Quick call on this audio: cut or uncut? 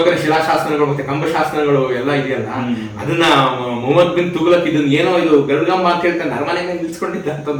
uncut